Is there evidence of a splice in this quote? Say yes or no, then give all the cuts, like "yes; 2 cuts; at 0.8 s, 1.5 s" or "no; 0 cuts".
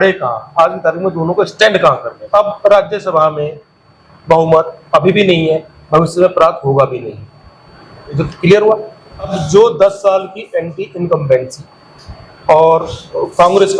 yes; 2 cuts; at 2.1 s, 9.4 s